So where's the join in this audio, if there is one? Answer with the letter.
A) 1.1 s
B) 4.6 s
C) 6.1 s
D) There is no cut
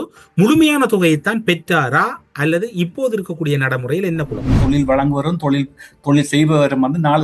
B